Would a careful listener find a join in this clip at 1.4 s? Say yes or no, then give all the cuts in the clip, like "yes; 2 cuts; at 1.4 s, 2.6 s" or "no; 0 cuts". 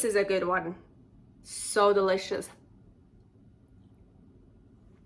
no; 0 cuts